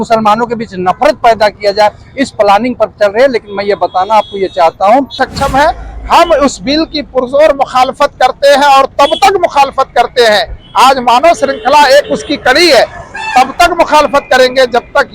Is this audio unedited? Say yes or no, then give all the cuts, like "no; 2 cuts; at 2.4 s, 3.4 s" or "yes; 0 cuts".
no; 1 cut; at 5.2 s